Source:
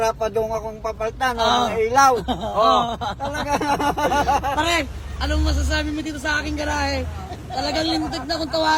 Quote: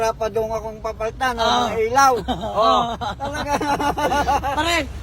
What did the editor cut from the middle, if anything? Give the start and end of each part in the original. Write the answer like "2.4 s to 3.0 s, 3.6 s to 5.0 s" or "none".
none